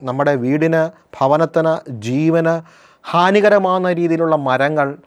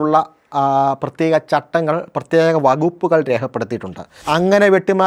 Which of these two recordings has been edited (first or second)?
second